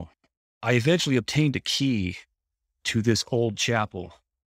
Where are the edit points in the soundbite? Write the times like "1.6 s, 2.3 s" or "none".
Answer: none